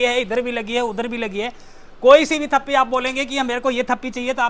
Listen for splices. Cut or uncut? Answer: uncut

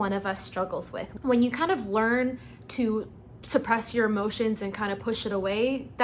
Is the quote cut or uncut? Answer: cut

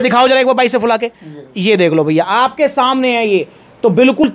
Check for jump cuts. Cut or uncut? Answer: uncut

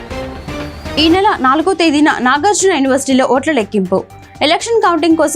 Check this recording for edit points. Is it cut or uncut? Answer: cut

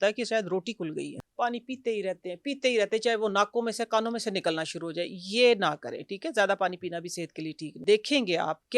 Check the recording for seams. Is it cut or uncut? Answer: cut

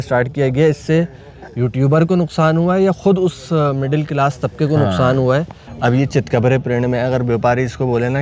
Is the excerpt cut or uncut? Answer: cut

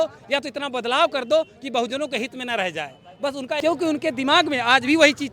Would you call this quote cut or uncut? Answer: cut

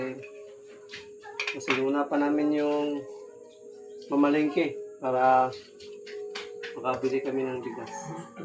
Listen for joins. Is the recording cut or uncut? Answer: uncut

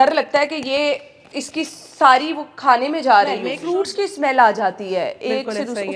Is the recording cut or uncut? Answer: cut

